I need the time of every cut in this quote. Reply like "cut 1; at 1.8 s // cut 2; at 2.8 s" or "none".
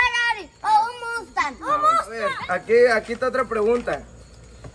cut 1; at 2.3 s